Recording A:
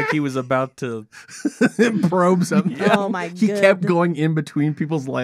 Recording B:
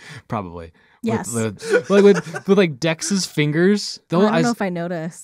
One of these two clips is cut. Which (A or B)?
B